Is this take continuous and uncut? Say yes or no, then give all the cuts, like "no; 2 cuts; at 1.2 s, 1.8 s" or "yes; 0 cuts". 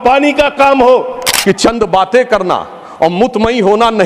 no; 1 cut; at 1.3 s